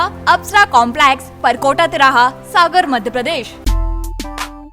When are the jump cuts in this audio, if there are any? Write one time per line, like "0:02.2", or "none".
0:03.5